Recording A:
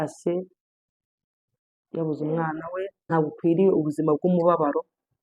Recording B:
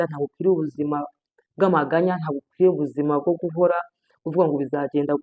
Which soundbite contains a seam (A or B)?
A